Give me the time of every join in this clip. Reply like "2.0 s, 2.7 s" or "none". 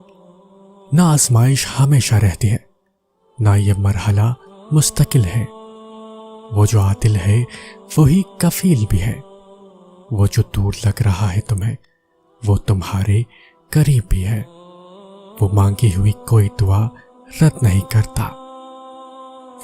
0.9 s